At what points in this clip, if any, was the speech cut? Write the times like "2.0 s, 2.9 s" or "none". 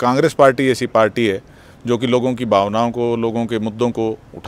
none